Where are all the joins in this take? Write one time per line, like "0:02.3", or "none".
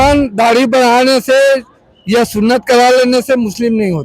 none